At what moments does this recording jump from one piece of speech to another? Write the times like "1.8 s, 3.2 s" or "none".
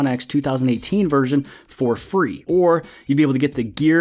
2.4 s